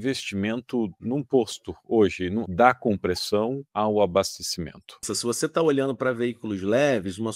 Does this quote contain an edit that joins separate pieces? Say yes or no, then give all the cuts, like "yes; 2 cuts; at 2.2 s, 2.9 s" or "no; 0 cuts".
yes; 4 cuts; at 1.0 s, 2.4 s, 3.6 s, 5.1 s